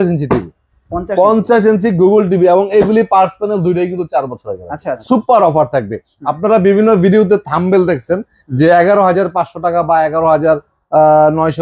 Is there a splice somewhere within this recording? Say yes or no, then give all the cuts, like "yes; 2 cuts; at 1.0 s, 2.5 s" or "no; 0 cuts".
yes; 1 cut; at 4.9 s